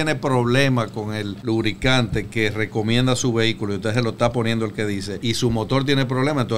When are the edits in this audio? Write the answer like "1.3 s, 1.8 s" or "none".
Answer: 1.3 s, 5.1 s